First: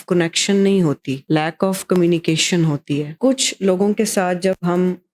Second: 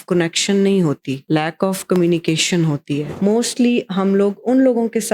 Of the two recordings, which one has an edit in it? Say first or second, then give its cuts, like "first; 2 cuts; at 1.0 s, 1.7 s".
second; 1 cut; at 3.1 s